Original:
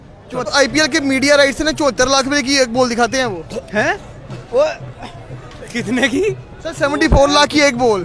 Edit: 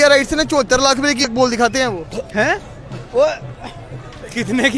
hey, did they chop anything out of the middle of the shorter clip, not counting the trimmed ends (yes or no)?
yes